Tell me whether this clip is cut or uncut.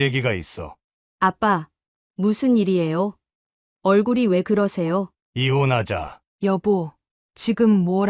cut